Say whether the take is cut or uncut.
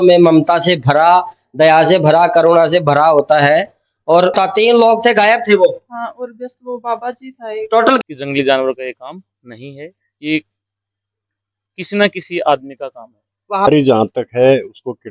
cut